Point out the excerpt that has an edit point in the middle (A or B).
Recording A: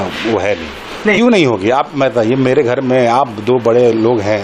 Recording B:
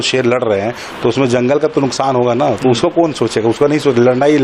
A